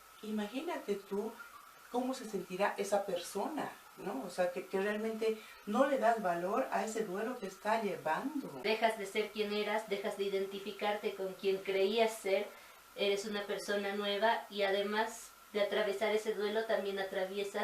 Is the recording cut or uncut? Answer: cut